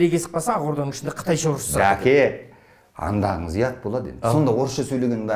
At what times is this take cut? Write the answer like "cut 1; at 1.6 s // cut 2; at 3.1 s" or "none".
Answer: none

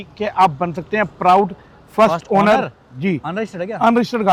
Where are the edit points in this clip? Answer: none

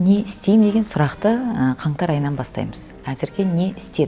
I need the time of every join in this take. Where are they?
none

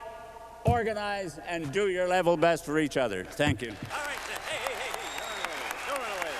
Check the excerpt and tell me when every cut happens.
cut 1; at 3.9 s

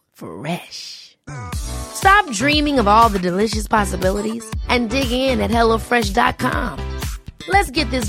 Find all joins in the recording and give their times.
none

